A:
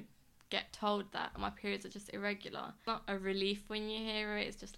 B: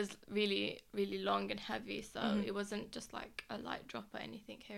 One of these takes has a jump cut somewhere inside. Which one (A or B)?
A